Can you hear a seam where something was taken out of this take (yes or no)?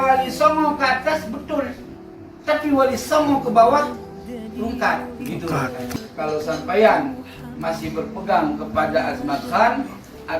yes